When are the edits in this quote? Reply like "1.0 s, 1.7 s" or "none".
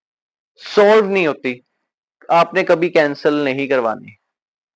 none